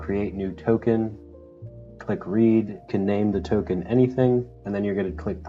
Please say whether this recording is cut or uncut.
uncut